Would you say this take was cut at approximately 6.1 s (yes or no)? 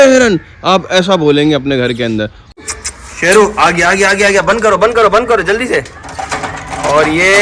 no